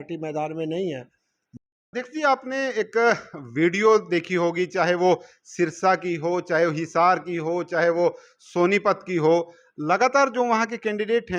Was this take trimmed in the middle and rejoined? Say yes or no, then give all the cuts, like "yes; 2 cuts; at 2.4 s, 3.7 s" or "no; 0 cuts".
yes; 1 cut; at 1.6 s